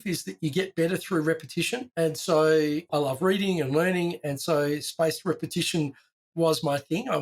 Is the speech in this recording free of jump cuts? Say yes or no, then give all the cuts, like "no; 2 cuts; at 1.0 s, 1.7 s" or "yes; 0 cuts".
yes; 0 cuts